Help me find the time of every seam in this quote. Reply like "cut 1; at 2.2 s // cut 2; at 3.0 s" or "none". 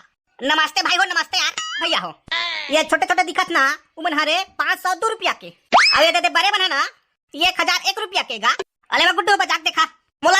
cut 1; at 1.8 s // cut 2; at 8.5 s